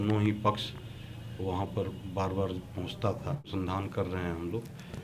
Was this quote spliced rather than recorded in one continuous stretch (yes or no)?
yes